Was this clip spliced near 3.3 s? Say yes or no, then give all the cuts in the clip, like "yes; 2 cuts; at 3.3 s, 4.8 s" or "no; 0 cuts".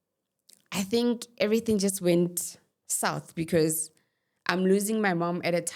no; 0 cuts